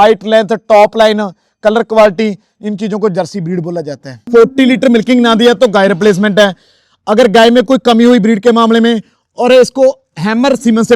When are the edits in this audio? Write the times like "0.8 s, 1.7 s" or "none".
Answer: 4.2 s